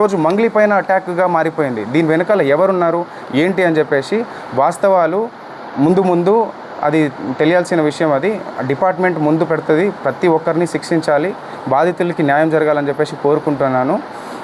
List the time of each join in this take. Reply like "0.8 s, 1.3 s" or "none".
none